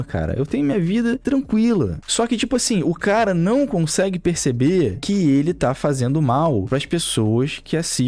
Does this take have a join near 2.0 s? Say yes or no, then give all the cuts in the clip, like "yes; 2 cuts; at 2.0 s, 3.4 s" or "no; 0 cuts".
yes; 1 cut; at 2.0 s